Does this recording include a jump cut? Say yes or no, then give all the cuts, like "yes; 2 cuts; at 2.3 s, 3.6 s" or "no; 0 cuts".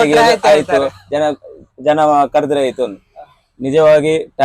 no; 0 cuts